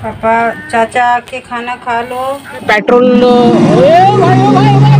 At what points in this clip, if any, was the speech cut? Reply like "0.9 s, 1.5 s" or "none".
2.6 s